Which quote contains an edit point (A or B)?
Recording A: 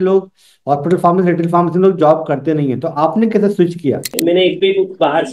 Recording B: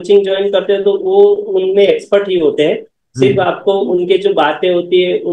A